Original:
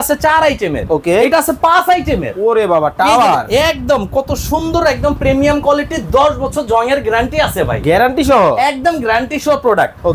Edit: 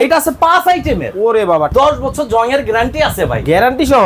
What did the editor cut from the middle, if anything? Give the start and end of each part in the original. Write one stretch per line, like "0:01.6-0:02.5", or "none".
0:02.9-0:06.1